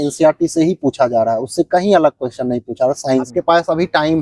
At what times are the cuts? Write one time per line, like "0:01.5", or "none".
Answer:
0:03.3